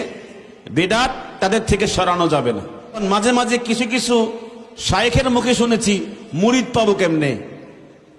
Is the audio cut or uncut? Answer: cut